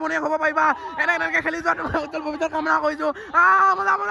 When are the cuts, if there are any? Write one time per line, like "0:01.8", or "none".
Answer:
none